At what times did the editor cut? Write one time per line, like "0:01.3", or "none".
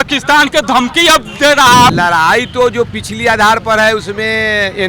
0:01.9